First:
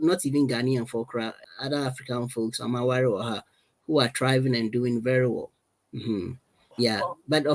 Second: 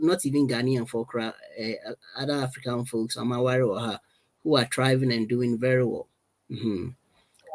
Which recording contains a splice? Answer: first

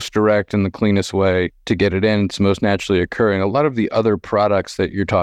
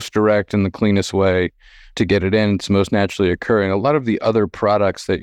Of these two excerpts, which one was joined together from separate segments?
first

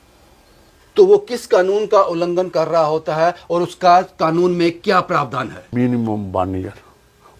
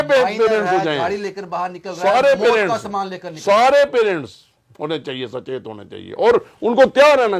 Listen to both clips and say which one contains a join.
first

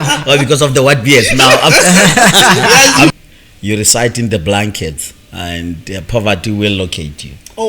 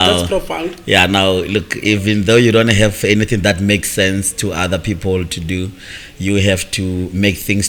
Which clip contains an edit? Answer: first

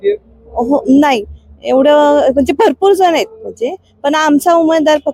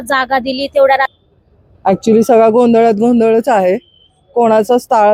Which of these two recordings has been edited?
second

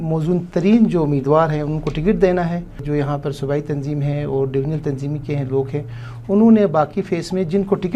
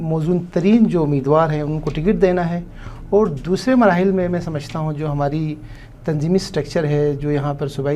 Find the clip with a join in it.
first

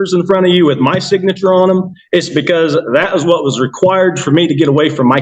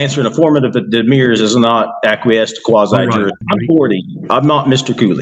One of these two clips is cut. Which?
second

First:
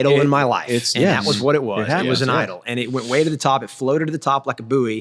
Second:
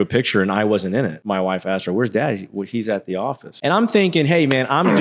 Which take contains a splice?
second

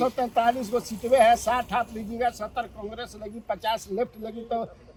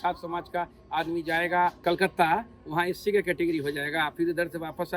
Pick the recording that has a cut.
second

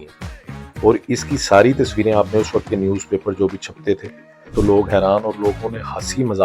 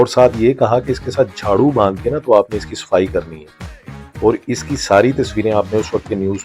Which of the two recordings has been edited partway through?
first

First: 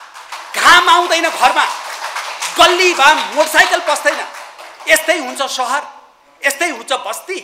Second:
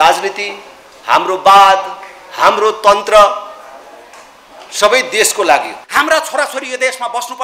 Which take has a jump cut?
second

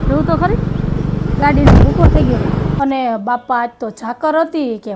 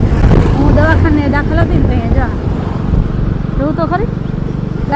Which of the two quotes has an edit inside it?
first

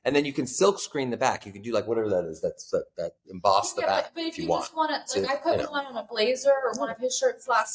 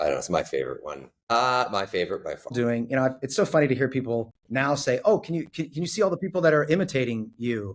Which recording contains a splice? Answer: second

